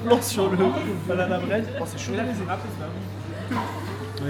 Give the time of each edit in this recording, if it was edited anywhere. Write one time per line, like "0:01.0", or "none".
none

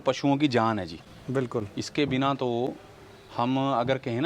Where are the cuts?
none

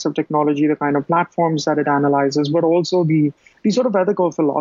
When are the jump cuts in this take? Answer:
0:03.5

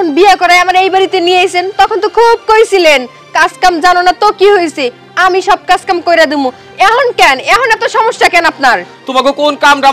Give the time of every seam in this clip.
none

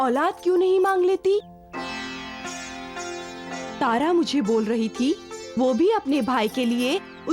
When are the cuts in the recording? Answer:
0:03.6

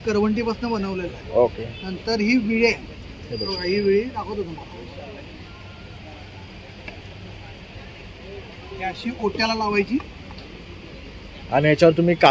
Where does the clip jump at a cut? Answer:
none

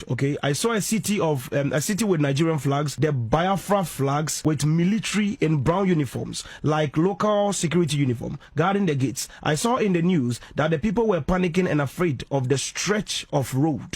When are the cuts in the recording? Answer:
0:02.9
0:04.3

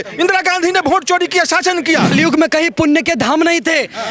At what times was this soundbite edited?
0:02.1

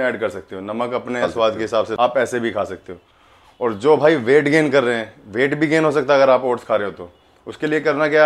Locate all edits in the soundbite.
none

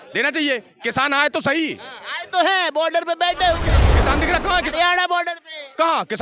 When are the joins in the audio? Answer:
none

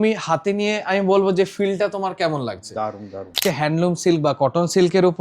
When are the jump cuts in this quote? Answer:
0:03.4

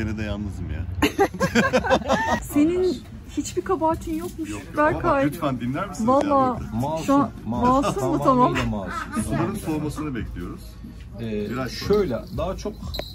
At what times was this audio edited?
0:02.4

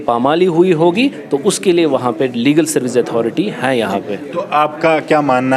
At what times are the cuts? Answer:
none

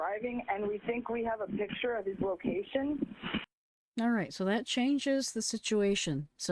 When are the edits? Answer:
none

